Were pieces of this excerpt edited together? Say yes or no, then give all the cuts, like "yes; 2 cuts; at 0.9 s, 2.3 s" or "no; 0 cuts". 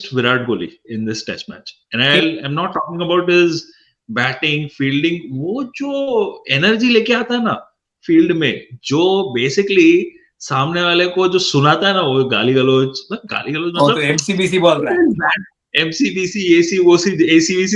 no; 0 cuts